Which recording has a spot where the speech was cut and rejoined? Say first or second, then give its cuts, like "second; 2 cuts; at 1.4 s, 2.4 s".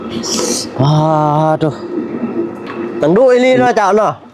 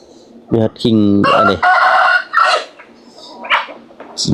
first; 1 cut; at 3.0 s